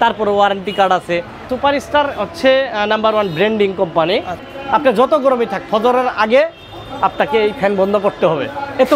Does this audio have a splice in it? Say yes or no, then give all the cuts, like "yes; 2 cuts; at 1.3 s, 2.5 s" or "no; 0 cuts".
yes; 2 cuts; at 1.4 s, 4.4 s